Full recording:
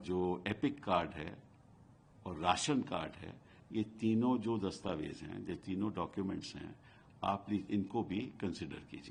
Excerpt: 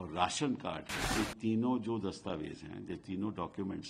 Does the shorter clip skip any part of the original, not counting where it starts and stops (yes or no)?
yes